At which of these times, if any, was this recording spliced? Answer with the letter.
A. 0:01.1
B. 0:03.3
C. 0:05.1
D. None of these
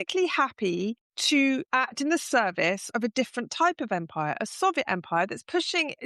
A